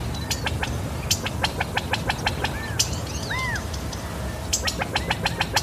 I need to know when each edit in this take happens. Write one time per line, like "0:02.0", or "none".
none